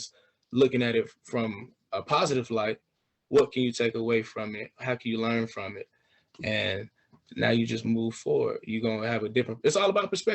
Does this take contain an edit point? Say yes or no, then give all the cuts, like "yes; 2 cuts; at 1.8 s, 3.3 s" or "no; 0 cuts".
no; 0 cuts